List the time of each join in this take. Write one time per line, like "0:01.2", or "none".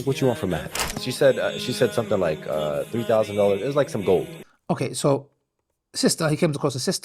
none